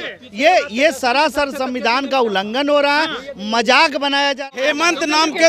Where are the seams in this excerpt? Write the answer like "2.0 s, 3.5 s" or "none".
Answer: 4.4 s